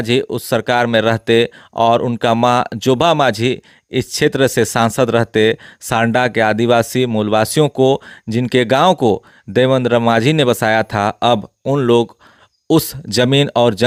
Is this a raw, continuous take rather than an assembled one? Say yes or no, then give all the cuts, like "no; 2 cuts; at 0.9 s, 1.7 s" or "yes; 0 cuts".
yes; 0 cuts